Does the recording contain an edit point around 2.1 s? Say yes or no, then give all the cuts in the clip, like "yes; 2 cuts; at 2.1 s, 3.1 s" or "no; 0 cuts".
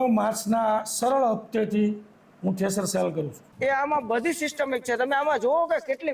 no; 1 cut; at 3.4 s